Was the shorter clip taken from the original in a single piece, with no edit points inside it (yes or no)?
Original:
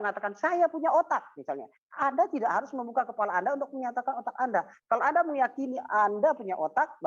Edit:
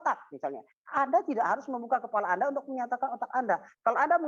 yes